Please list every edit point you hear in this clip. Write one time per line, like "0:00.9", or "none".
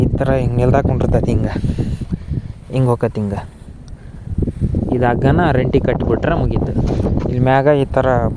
none

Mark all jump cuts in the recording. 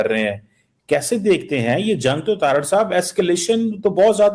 none

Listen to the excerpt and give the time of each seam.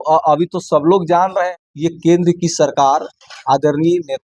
0:01.6

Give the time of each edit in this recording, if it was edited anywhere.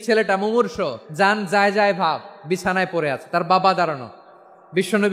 0:01.0

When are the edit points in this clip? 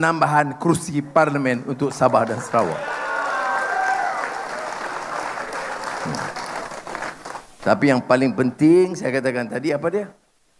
none

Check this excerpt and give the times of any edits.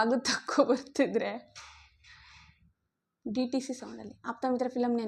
none

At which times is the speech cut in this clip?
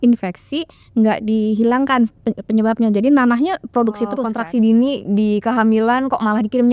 0:04.3

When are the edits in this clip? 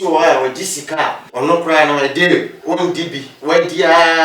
0:01.2
0:03.1

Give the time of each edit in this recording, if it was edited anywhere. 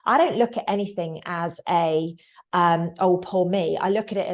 none

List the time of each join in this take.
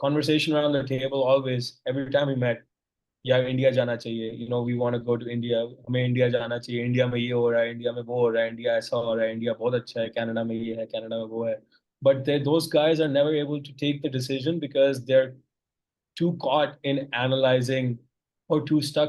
none

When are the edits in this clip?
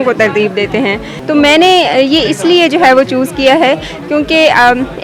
none

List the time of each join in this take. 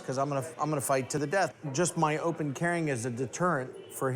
0:01.3

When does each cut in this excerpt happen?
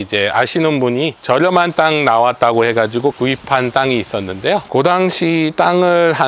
0:03.2
0:04.6

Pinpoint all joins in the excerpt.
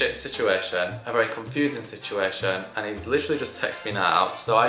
none

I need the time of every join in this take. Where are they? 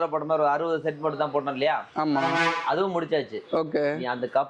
none

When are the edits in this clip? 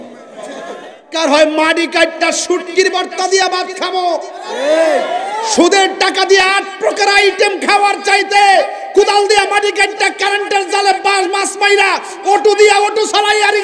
0:01.2

